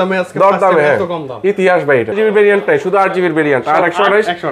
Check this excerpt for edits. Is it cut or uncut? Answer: cut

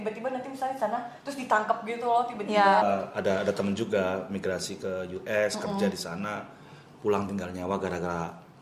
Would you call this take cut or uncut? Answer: cut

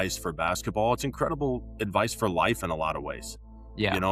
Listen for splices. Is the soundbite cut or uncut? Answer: uncut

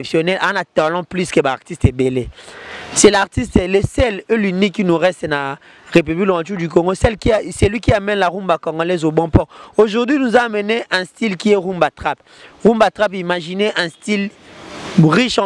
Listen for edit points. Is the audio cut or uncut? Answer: uncut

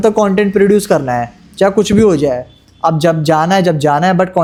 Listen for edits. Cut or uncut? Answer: uncut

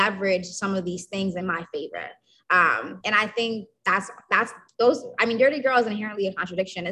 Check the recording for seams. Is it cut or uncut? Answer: cut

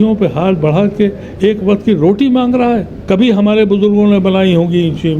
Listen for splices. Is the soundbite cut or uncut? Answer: cut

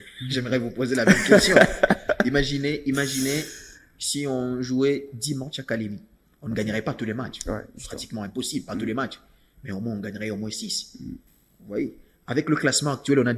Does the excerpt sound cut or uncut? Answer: uncut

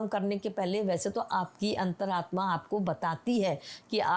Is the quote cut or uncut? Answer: uncut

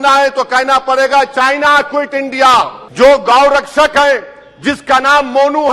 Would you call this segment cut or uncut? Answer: cut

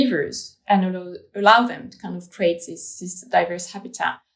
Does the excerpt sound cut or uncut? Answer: uncut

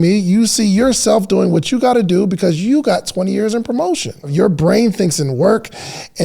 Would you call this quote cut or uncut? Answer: cut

